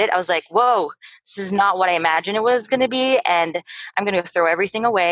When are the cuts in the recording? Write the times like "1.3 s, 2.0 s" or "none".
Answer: none

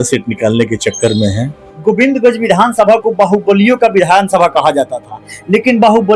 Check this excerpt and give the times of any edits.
1.7 s

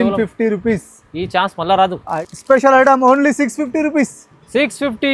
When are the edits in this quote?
2.1 s

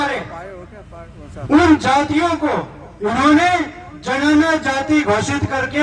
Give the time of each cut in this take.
none

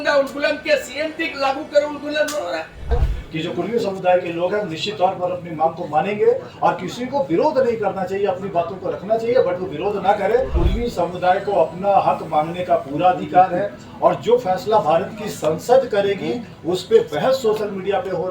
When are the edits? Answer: 2.9 s, 10.5 s

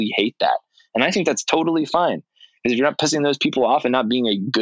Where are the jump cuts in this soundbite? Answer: none

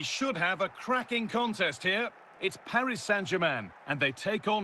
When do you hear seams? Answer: 2.2 s

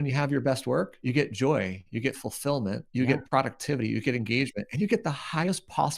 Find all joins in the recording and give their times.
1.0 s, 1.8 s, 2.8 s

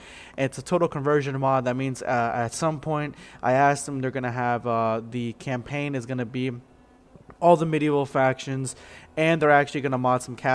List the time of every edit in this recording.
none

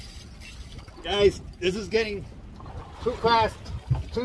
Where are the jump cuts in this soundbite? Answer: none

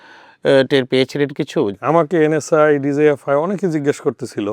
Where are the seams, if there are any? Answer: 1.8 s

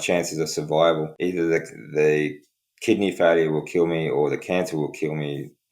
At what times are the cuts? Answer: 1.1 s

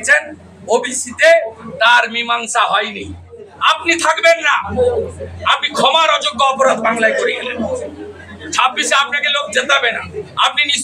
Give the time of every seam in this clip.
3.5 s

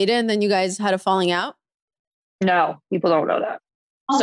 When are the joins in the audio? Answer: none

